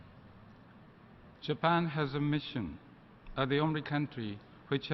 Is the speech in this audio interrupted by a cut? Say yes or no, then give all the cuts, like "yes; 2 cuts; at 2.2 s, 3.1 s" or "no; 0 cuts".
no; 0 cuts